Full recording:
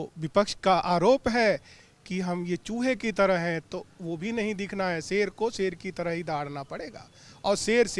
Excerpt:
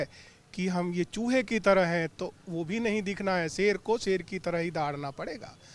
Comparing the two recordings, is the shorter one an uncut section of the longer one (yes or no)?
yes